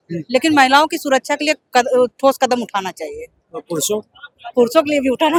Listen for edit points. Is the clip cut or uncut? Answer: uncut